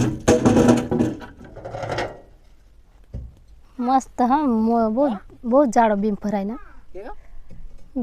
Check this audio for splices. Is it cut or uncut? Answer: uncut